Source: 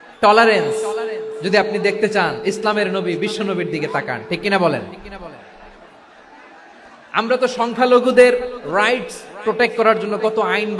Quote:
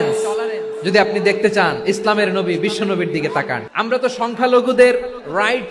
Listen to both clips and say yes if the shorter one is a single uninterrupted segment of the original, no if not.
no